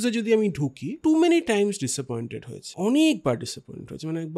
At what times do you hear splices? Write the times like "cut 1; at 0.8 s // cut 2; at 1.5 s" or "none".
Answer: cut 1; at 0.9 s // cut 2; at 2.6 s